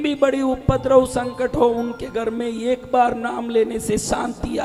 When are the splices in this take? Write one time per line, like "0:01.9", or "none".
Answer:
none